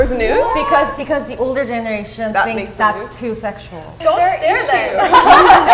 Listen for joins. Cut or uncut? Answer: cut